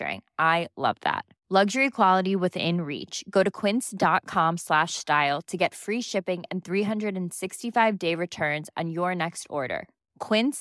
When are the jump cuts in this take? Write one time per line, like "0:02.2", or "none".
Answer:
none